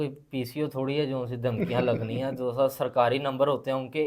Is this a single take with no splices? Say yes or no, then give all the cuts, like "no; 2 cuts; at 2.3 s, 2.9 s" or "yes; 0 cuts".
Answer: yes; 0 cuts